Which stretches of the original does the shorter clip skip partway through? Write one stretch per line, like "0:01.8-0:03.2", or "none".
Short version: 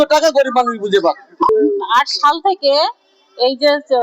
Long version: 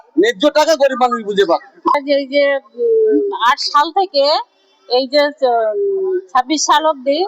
0:01.9-0:03.0